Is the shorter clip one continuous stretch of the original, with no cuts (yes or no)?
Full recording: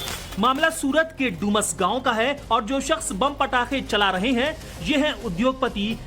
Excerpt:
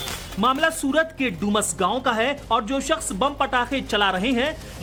yes